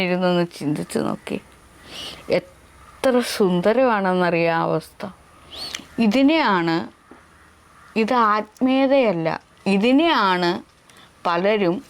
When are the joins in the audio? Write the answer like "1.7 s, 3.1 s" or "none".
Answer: none